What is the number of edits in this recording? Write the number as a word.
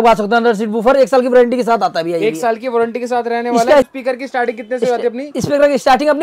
one